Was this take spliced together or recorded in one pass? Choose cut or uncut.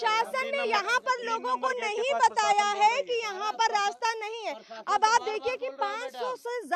uncut